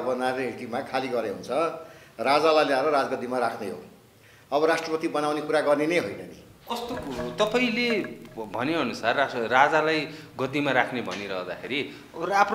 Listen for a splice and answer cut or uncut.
uncut